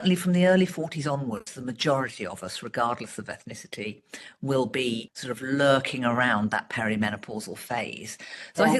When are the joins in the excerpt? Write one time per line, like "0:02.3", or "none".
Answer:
0:05.1